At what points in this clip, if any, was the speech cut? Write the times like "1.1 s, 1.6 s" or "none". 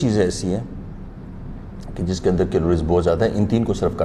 none